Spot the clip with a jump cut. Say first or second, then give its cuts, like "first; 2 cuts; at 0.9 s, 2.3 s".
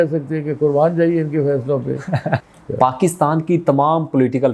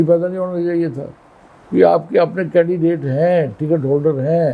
first; 1 cut; at 2.4 s